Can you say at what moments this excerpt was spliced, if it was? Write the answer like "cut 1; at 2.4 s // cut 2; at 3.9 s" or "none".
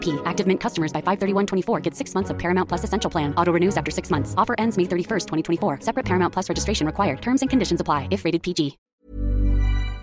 cut 1; at 8.8 s